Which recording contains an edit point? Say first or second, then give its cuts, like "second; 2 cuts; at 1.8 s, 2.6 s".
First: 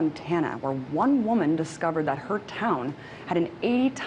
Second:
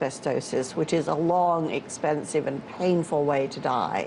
first; 1 cut; at 1.5 s